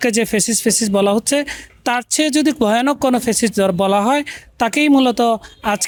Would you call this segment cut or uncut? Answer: uncut